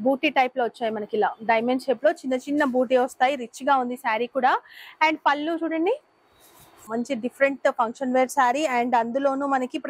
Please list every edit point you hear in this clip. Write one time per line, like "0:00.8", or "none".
0:06.8